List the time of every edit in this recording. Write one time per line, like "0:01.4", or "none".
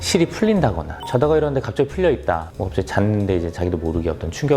0:00.9